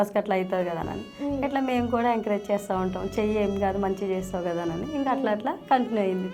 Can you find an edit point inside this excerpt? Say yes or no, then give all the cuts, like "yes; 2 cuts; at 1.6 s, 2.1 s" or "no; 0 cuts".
no; 0 cuts